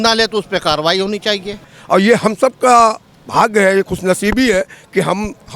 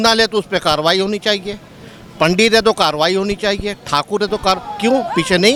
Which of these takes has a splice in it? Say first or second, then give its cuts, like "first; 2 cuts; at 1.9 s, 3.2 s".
first; 1 cut; at 1.7 s